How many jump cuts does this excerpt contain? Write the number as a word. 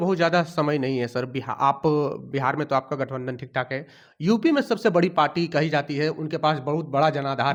zero